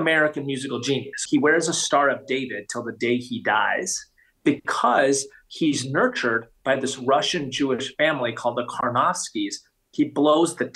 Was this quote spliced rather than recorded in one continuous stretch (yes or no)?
yes